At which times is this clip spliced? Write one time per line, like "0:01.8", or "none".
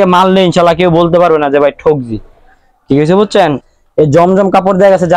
0:03.7